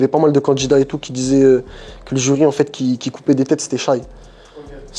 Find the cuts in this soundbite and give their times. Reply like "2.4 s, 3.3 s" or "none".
none